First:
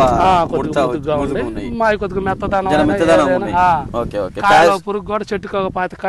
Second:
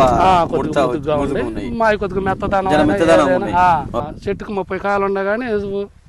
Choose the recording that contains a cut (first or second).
second